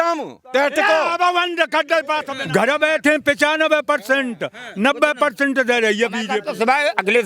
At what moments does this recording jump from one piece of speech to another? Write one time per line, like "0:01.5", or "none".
0:02.3
0:06.4